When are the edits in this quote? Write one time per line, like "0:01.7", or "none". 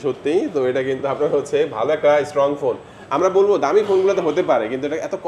none